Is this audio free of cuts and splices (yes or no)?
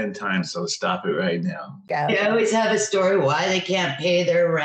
no